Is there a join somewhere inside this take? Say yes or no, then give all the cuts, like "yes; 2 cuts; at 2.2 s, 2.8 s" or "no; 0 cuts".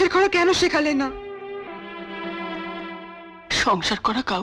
no; 0 cuts